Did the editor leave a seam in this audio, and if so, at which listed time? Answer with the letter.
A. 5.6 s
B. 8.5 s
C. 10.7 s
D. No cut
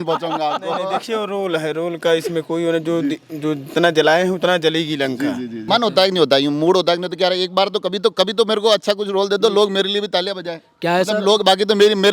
A